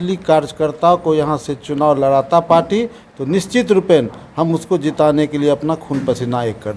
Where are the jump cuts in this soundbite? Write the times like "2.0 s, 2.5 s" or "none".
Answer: none